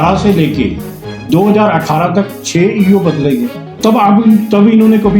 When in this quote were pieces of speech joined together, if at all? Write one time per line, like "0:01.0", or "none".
0:03.6

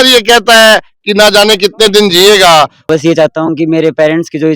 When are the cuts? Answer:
0:02.9

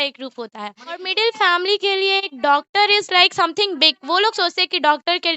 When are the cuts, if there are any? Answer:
0:01.1

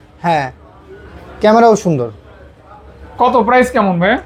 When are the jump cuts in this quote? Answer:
none

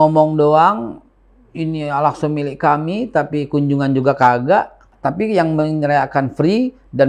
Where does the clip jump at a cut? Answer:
0:04.8

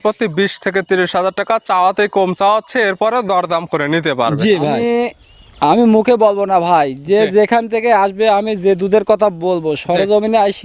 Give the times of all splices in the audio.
0:04.8

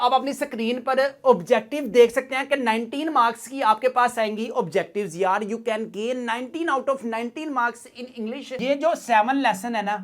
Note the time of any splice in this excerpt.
0:08.6

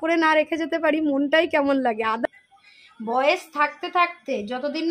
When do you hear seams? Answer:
0:02.3

